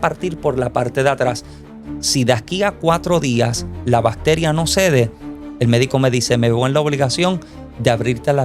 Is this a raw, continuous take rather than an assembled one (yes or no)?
no